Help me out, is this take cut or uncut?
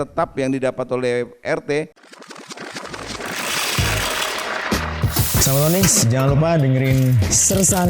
cut